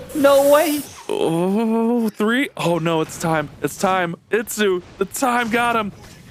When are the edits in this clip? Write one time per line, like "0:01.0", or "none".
none